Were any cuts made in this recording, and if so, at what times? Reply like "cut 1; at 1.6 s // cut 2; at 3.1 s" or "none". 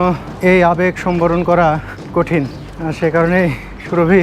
none